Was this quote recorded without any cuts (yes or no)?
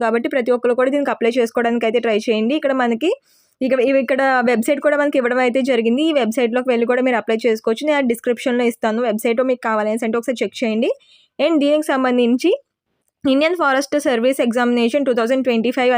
yes